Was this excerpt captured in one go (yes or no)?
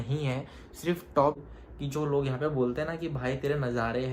no